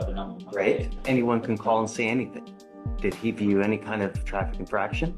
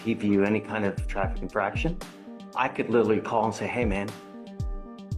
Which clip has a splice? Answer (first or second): second